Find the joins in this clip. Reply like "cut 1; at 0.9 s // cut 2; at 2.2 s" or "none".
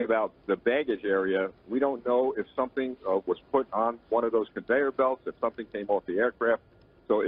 cut 1; at 3.5 s